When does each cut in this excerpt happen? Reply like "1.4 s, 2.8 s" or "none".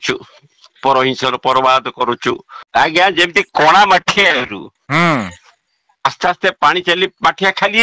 2.6 s